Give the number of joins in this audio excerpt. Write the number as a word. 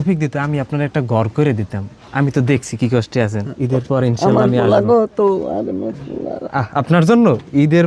one